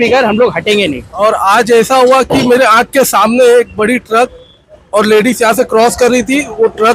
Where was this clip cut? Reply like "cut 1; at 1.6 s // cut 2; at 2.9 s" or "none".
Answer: cut 1; at 1.0 s